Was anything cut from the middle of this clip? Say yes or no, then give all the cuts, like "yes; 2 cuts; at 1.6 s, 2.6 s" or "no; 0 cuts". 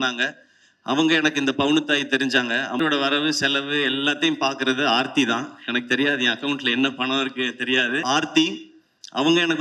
yes; 2 cuts; at 2.8 s, 8.0 s